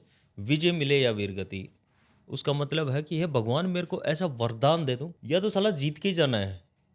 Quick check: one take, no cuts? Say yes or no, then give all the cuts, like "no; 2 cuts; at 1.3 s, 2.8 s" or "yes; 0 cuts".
no; 1 cut; at 5.1 s